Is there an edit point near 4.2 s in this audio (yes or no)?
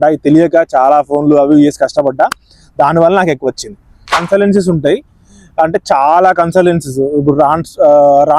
yes